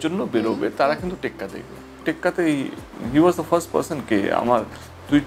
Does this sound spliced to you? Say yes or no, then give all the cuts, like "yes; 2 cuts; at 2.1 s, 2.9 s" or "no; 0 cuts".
yes; 1 cut; at 2.0 s